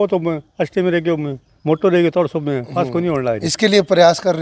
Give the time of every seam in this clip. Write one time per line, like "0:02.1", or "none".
none